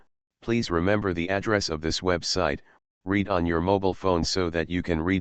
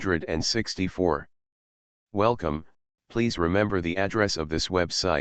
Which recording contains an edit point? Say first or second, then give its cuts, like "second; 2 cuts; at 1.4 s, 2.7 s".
second; 1 cut; at 1.0 s